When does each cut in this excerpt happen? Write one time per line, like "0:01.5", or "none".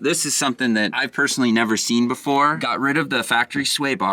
0:01.0
0:02.6